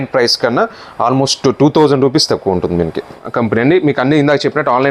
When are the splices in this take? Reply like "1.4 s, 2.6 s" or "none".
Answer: 3.2 s